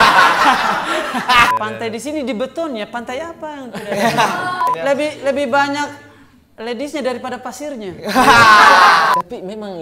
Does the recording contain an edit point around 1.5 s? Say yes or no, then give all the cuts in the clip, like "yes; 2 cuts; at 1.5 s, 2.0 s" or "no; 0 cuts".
yes; 3 cuts; at 1.5 s, 4.7 s, 9.1 s